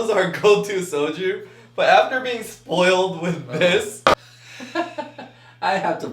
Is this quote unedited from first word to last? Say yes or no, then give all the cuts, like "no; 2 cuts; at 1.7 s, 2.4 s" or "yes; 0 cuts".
no; 1 cut; at 4.2 s